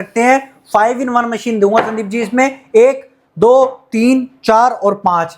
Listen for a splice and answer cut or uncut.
uncut